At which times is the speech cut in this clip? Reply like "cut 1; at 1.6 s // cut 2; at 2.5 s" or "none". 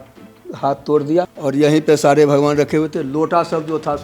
cut 1; at 1.3 s